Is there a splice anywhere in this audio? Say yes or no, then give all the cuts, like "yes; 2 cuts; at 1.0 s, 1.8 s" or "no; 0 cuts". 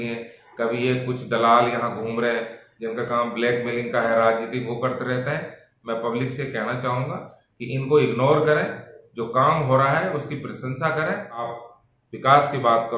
yes; 1 cut; at 11.5 s